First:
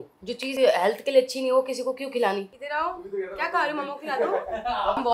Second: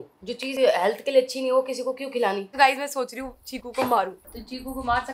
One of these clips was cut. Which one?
second; 2 cuts; at 2.5 s, 4.2 s

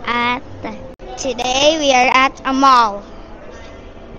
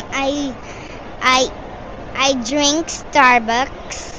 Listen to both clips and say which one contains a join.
first; 1 cut; at 0.9 s

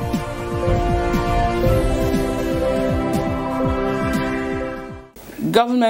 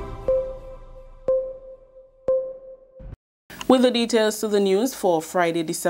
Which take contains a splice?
first; 1 cut; at 2.0 s

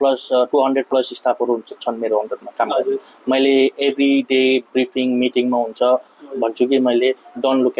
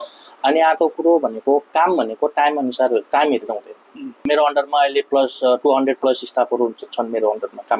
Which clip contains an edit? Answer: second; 1 cut; at 4.2 s

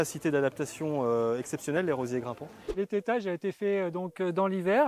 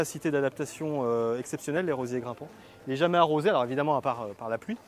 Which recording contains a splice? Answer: first; 1 cut; at 2.7 s

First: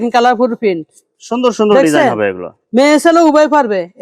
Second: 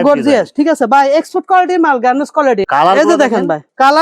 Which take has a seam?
second; 1 cut; at 2.6 s

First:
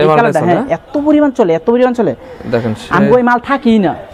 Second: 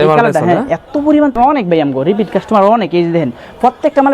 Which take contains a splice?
second; 1 cut; at 1.3 s

